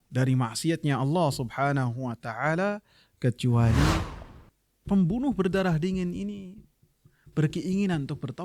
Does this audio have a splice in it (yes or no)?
yes